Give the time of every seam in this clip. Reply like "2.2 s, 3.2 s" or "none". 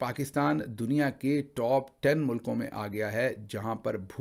none